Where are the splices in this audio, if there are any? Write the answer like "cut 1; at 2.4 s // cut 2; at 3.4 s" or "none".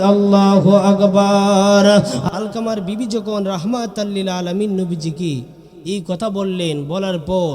cut 1; at 2.3 s